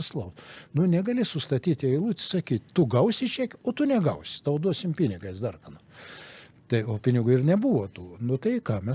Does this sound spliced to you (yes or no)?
no